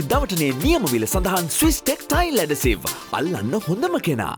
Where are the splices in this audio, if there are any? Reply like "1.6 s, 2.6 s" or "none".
none